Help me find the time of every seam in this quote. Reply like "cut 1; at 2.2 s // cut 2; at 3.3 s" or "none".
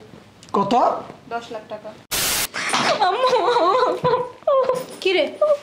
cut 1; at 2.4 s